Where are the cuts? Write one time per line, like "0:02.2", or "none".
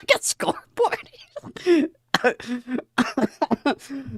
none

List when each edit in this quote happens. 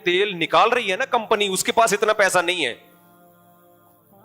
0:02.8

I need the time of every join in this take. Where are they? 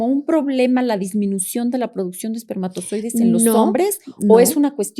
none

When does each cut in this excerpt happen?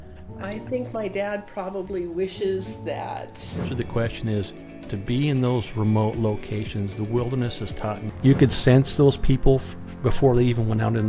0:03.7
0:08.0

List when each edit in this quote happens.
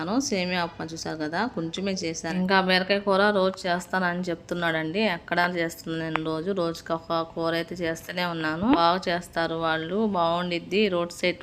0:02.2
0:08.8

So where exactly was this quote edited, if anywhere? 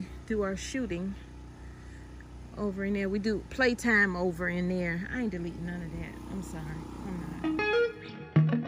0:07.4

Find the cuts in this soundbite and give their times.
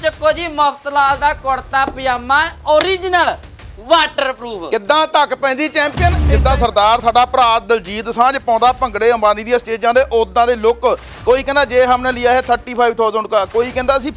0:06.3
0:11.1

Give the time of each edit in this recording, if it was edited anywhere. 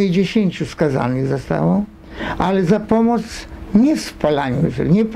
none

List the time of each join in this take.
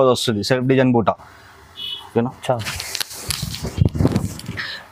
none

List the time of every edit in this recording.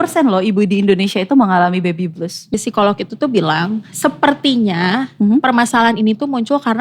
0:02.5

